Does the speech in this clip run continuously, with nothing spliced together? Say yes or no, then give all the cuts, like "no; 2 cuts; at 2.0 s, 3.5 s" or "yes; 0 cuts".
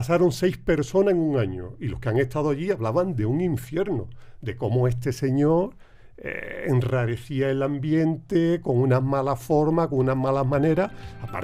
yes; 0 cuts